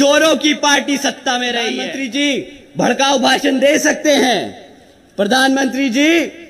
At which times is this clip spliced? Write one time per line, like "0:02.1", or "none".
0:01.8